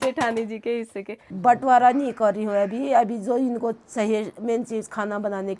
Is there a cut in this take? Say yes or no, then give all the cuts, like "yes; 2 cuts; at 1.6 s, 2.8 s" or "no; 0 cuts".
yes; 1 cut; at 1.2 s